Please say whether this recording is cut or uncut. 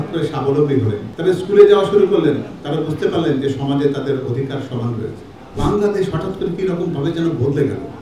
cut